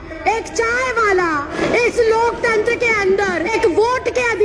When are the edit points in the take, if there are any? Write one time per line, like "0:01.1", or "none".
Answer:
0:01.5
0:03.5